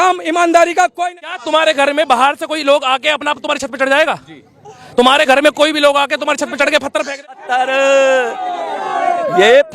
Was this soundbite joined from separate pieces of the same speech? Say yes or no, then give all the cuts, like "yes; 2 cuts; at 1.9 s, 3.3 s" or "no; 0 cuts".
yes; 2 cuts; at 0.9 s, 7.2 s